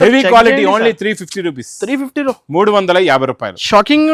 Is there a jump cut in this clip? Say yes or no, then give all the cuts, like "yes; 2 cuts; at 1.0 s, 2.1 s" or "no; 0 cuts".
no; 0 cuts